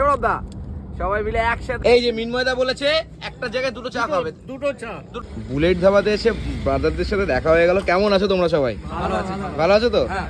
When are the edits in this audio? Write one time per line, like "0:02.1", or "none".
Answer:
0:01.8
0:05.2